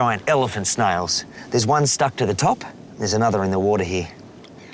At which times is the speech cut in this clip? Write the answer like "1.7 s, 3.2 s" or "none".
none